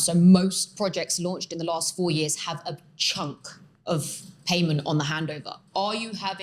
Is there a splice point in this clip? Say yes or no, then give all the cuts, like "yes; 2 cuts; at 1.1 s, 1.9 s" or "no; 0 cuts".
no; 0 cuts